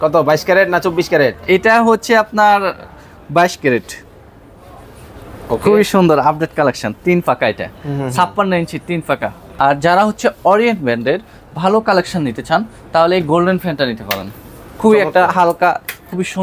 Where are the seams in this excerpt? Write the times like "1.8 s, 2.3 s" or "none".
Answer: 9.4 s